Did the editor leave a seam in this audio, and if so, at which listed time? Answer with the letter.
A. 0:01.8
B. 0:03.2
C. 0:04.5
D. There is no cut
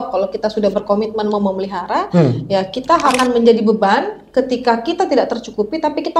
B